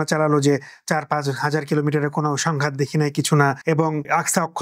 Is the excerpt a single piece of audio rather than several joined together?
yes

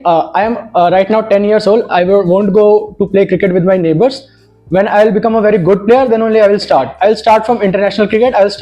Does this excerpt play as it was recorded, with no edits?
yes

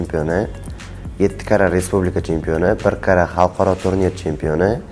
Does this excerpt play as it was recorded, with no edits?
yes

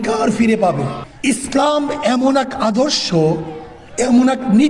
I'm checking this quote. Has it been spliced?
yes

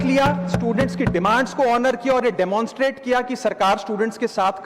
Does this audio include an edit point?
no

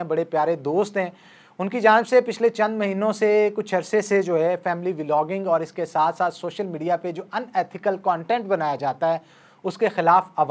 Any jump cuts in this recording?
no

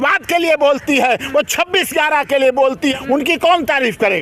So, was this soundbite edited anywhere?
yes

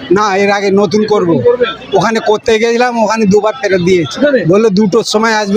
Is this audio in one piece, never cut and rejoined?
no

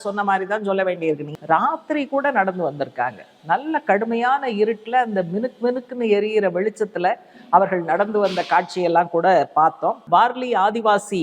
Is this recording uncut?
no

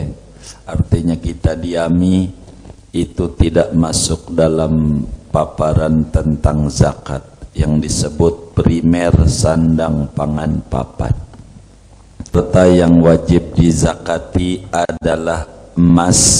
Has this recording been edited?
yes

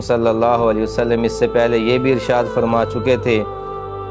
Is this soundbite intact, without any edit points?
yes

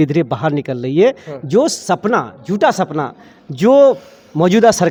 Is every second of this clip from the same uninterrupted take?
yes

